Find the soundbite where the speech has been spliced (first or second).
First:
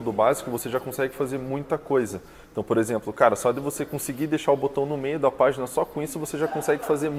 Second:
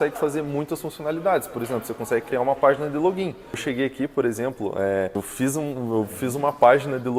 second